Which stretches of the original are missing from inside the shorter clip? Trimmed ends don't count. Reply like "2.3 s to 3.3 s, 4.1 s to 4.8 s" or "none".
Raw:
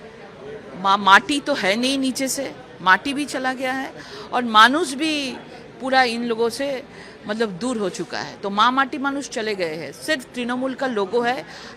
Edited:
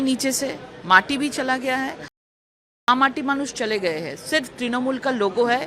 4.2 s to 8.0 s

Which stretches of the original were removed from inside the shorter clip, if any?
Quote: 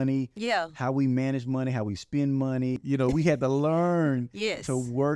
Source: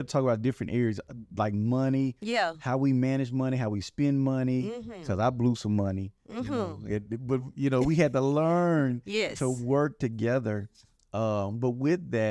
4.7 s to 7.5 s

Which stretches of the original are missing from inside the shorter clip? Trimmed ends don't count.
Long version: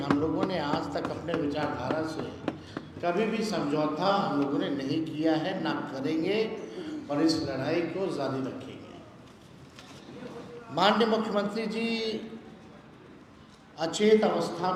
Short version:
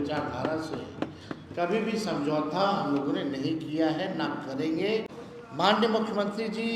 6.6 s to 10.3 s

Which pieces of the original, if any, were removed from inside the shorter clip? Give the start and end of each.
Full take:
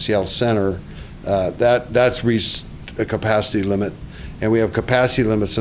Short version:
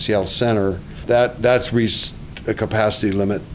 1.0 s to 1.5 s

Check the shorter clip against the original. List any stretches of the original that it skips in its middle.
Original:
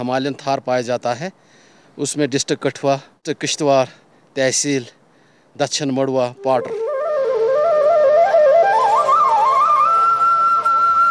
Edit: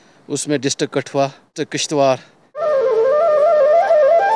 4.3 s to 7.0 s

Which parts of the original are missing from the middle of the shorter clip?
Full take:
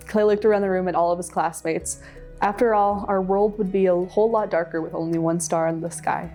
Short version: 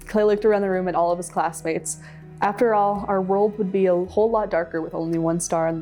none

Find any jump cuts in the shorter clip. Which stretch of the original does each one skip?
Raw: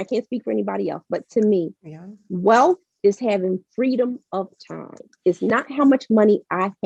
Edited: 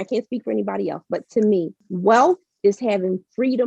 1.8 s to 2.2 s

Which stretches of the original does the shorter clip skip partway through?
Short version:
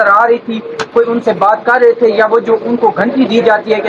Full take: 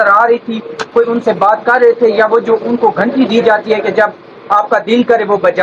none

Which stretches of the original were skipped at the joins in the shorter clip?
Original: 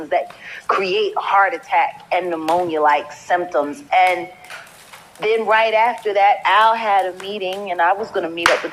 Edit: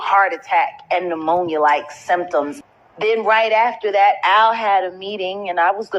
3.8 s to 4.8 s

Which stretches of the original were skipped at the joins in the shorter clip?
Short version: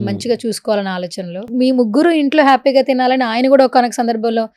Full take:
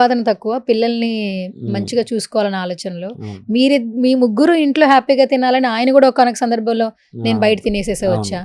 3.1 s to 3.9 s

